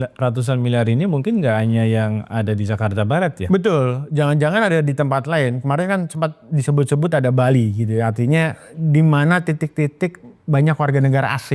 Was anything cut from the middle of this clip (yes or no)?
no